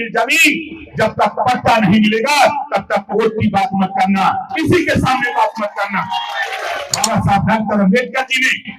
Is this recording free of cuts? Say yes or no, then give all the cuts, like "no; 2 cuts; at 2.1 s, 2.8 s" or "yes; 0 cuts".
no; 1 cut; at 6.9 s